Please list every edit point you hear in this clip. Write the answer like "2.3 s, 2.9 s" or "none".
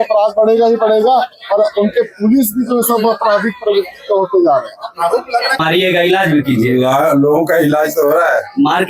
5.6 s

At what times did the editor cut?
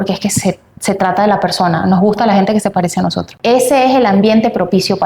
3.3 s

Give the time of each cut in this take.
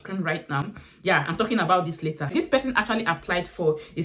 2.3 s

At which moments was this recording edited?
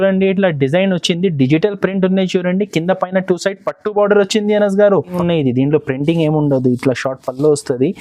5.1 s

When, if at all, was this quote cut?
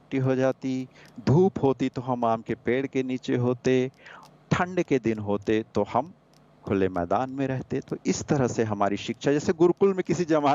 none

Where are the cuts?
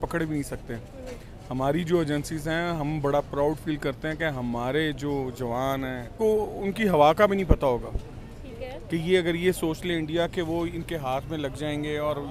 6.1 s

